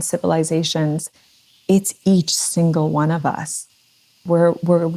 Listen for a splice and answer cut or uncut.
uncut